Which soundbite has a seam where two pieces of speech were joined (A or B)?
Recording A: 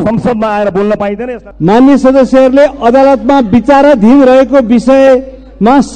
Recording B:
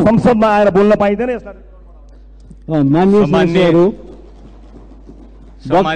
A